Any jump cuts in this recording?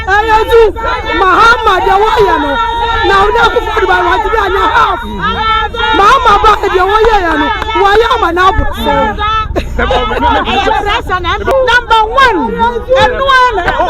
yes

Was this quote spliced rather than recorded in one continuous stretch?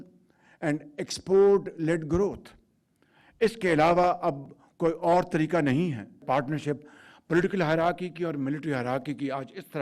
yes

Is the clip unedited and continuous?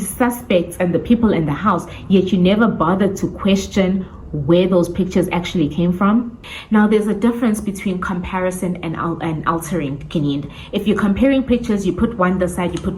no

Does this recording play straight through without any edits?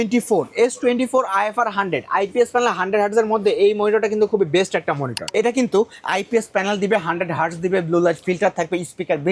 no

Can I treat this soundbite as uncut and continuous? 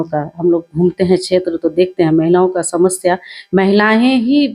yes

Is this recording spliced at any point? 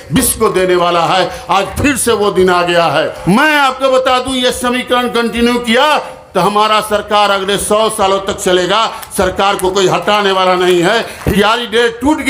yes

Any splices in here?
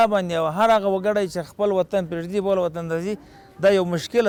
no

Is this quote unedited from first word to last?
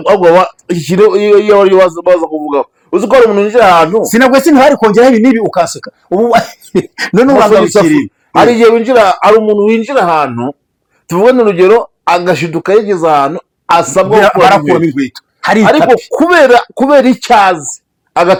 yes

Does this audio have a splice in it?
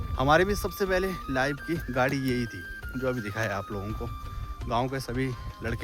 no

